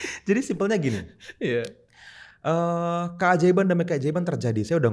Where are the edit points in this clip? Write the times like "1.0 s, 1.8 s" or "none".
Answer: none